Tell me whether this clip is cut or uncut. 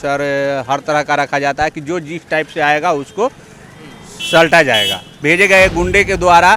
cut